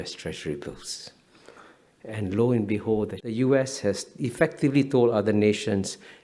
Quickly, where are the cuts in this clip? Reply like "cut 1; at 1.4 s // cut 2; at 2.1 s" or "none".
cut 1; at 3.3 s